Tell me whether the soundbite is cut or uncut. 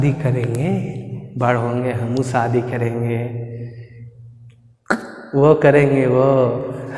uncut